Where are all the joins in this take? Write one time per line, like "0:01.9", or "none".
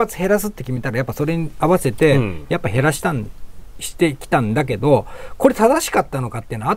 none